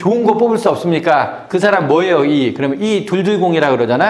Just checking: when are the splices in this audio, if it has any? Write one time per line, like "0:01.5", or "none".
0:01.5